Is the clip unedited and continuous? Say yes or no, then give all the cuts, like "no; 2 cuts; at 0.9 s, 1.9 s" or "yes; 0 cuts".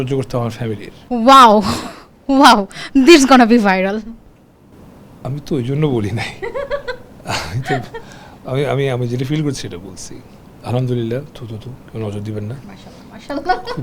no; 2 cuts; at 0.9 s, 10.5 s